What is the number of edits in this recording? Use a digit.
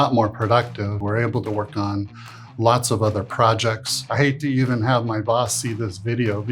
2